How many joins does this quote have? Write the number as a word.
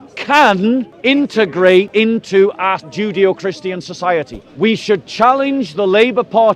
four